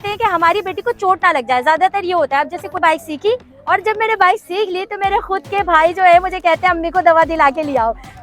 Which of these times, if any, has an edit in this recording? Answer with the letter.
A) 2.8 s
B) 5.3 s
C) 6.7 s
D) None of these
A